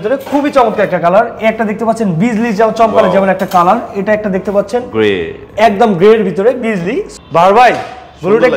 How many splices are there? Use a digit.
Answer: 1